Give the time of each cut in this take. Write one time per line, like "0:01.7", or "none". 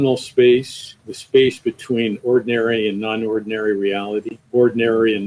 0:01.1
0:04.4